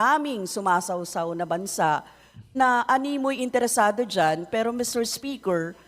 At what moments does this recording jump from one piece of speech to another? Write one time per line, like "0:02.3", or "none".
0:01.3